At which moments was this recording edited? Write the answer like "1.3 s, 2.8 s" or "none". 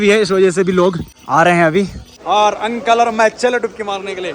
1.1 s, 2.1 s